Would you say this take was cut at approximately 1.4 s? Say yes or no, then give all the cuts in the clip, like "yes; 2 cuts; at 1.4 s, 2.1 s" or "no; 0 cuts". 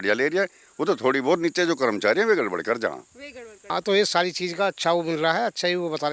no; 1 cut; at 3.5 s